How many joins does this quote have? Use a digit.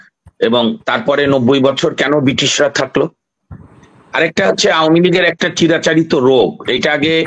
0